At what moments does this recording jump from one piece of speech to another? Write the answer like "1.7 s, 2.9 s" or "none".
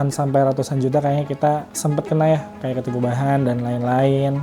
1.7 s